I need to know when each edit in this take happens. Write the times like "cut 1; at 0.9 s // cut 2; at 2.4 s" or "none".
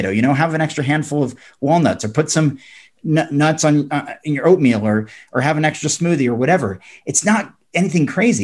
none